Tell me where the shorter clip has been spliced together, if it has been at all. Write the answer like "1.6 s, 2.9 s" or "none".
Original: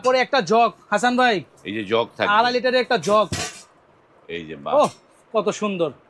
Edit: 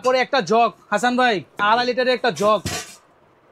1.5 s